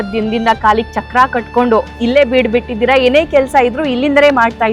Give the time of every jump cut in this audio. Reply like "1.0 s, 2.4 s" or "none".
none